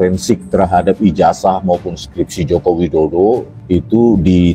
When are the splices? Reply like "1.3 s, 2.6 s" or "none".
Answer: 3.5 s